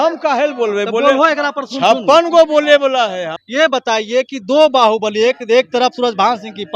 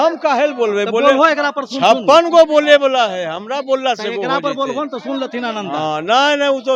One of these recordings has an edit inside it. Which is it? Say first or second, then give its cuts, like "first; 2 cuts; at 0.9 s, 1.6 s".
first; 1 cut; at 3.4 s